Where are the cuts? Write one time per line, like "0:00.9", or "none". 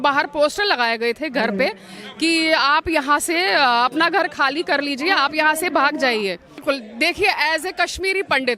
0:06.5